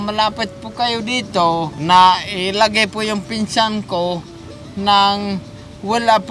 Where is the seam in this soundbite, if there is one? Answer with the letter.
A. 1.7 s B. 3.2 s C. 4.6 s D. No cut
A